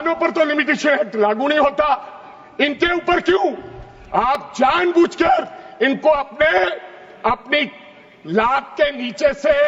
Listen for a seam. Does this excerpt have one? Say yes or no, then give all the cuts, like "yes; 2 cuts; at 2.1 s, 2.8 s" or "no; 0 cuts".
no; 0 cuts